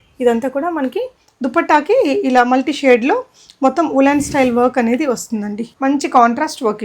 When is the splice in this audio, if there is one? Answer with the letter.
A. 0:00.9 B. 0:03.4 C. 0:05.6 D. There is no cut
C